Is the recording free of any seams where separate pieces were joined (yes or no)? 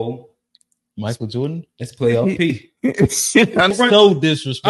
no